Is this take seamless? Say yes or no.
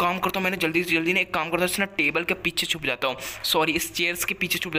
yes